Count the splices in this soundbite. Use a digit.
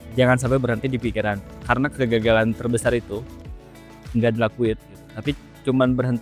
0